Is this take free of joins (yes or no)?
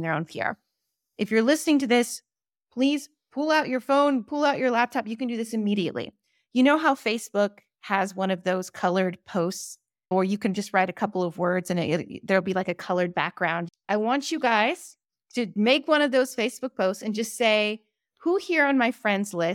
no